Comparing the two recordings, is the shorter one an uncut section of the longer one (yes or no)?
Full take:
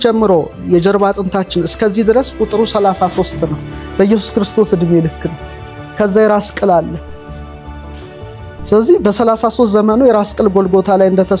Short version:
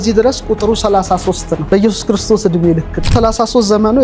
no